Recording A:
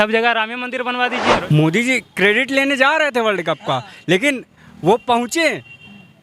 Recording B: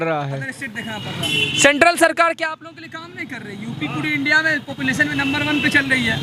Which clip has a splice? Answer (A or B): A